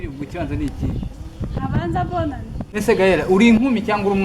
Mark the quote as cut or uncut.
cut